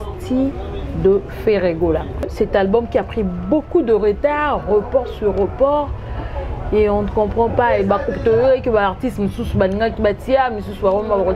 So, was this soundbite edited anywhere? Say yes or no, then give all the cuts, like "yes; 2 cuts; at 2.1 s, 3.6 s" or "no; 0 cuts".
yes; 1 cut; at 2.2 s